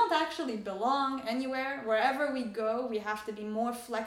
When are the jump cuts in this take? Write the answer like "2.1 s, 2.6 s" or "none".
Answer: none